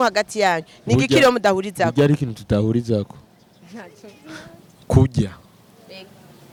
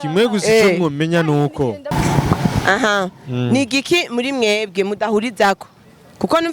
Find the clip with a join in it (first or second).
second